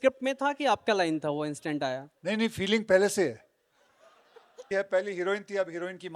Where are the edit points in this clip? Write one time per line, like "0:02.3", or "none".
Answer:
0:04.6

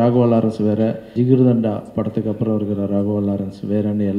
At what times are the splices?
0:01.1

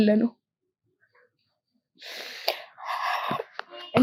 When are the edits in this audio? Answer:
none

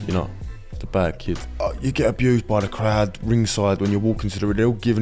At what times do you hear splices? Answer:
0:01.5

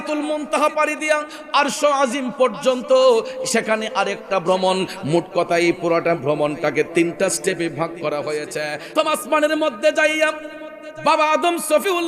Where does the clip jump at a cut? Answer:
0:08.9

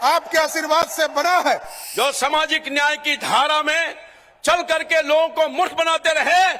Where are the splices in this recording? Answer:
0:01.8

